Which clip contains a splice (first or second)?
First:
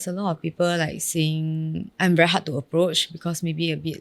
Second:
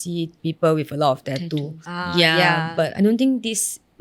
first